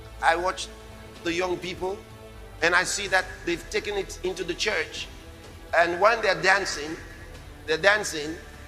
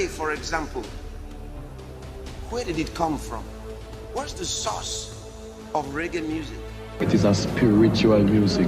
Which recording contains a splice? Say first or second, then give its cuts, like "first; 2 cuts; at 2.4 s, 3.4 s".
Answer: second; 1 cut; at 7.0 s